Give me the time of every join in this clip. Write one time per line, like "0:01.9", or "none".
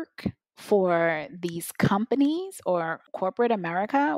0:03.0